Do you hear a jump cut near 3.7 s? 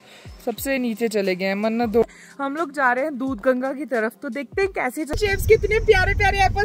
no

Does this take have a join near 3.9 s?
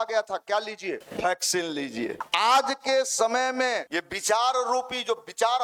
yes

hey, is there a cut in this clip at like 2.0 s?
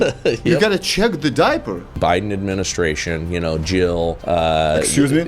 yes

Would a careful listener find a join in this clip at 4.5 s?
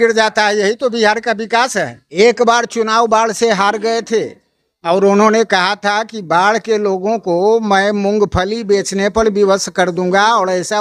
no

